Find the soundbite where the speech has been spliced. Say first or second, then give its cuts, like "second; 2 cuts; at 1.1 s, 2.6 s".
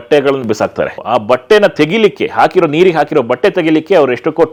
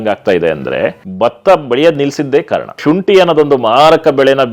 second; 2 cuts; at 1.0 s, 2.8 s